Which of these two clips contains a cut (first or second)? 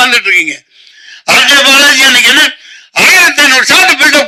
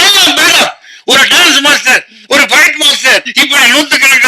second